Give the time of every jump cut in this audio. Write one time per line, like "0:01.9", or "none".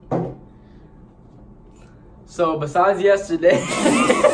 none